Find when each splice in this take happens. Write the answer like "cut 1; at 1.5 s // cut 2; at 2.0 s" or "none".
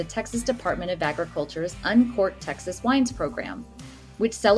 none